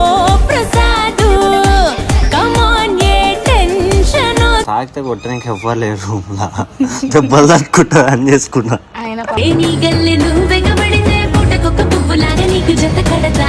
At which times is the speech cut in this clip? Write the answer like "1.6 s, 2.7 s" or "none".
4.6 s

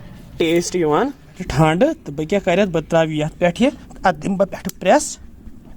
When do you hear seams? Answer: 1.4 s

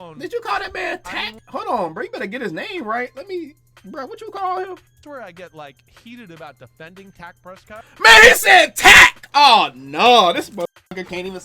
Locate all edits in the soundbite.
4.9 s

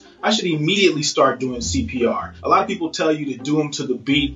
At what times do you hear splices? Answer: 2.3 s

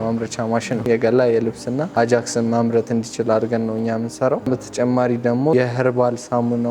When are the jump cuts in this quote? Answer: 0.9 s, 4.5 s, 5.5 s

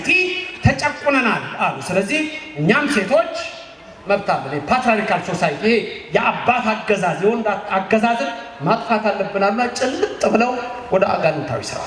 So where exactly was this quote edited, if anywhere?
none

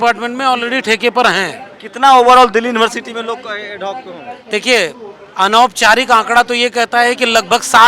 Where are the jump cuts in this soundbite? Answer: none

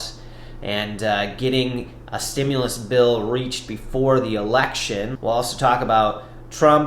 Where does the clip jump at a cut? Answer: 5.1 s

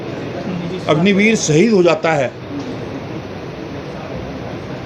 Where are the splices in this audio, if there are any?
none

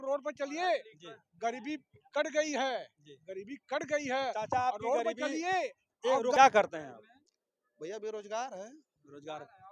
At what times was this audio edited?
6.4 s

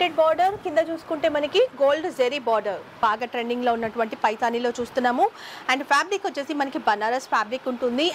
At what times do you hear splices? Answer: 2.9 s

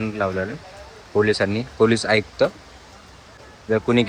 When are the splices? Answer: none

